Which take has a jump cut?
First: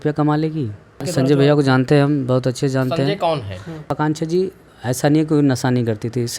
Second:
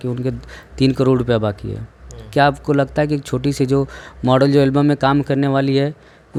first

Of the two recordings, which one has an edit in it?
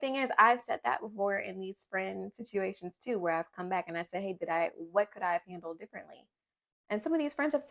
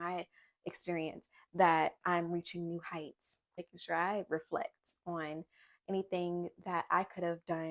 second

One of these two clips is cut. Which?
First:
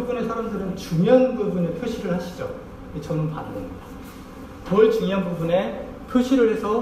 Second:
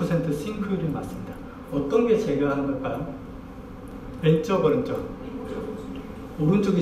second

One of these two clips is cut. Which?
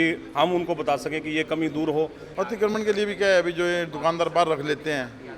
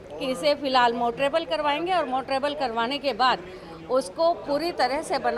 first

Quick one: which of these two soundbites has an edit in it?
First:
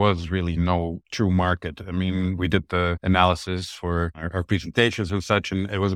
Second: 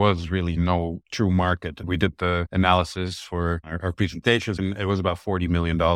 second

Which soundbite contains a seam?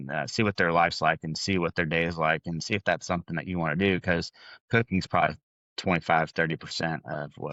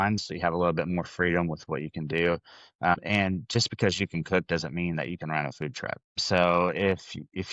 second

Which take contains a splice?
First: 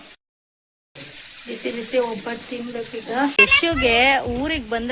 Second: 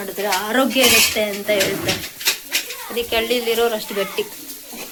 first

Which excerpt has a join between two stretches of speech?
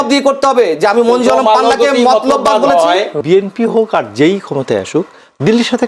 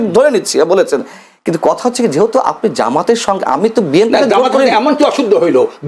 first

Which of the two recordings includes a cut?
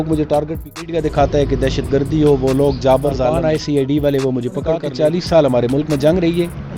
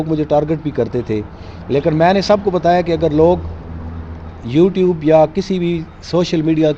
first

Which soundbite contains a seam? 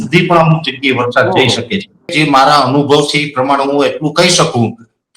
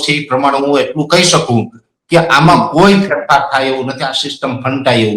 first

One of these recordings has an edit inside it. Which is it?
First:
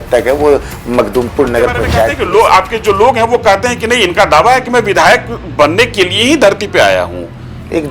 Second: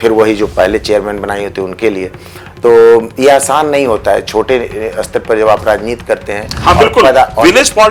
first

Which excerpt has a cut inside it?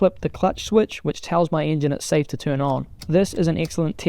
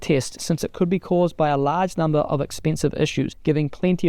first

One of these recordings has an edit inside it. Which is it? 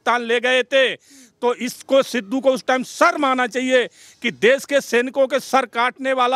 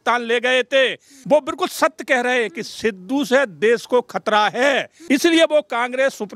second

